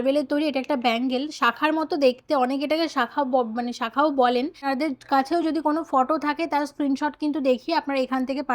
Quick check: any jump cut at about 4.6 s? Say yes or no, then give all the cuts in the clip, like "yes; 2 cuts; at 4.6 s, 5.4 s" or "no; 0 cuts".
yes; 1 cut; at 4.6 s